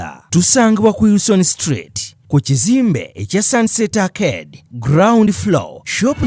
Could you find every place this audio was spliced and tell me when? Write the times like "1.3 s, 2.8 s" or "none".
none

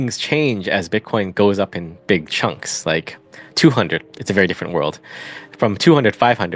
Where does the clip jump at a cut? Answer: none

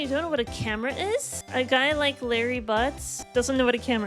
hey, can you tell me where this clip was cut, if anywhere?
1.4 s, 3.1 s

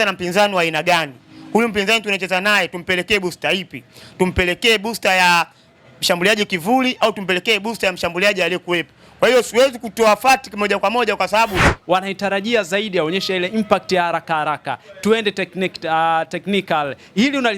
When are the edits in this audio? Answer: 11.7 s

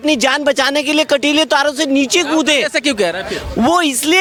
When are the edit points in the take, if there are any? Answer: none

